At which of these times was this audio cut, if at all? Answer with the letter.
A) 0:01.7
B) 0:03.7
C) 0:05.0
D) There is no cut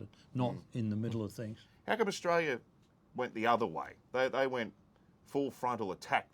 A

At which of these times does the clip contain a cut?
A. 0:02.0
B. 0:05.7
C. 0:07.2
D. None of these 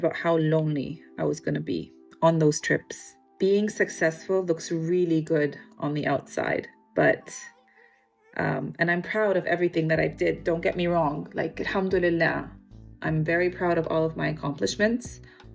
A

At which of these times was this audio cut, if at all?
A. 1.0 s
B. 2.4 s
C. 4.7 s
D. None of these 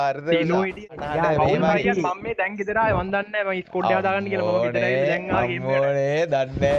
A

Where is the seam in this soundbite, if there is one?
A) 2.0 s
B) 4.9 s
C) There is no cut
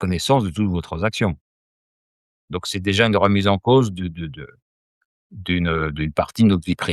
A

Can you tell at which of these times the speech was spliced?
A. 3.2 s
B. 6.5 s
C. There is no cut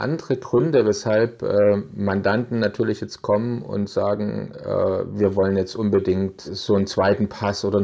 B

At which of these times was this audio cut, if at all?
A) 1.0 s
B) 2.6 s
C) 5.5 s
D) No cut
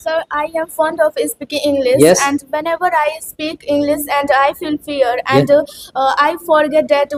D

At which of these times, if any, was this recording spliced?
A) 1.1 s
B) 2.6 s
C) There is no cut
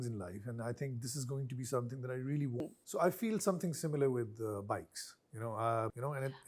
B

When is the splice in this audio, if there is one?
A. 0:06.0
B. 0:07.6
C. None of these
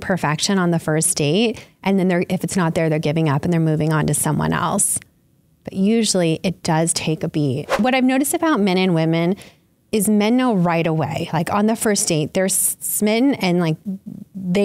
B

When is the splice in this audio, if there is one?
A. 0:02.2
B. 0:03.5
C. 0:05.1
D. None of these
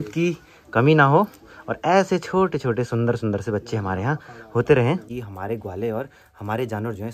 C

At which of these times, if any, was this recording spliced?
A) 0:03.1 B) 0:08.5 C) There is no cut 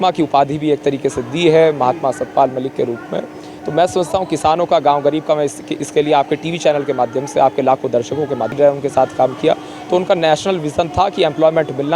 B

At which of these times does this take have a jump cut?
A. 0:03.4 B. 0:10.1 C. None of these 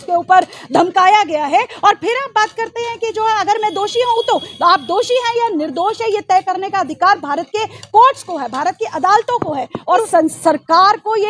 B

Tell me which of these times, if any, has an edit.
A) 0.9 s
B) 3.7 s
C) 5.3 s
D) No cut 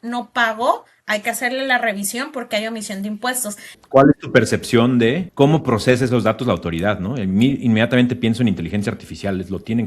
B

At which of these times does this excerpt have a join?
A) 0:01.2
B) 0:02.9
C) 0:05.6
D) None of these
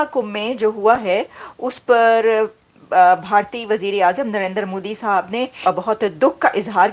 C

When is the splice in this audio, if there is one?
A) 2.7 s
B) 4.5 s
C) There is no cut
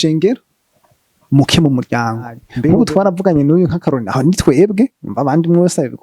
A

